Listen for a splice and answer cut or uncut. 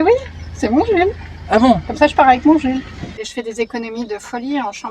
cut